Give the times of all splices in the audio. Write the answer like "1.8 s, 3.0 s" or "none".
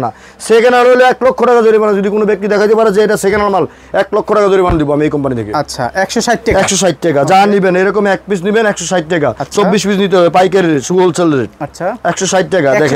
none